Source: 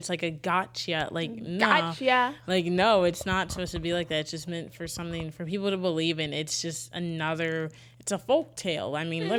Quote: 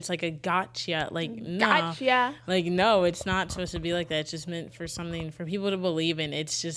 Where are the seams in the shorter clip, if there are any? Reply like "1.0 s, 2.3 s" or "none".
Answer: none